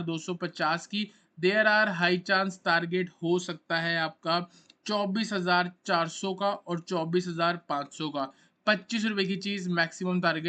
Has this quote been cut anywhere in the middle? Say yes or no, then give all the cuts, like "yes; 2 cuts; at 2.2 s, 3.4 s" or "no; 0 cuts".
no; 0 cuts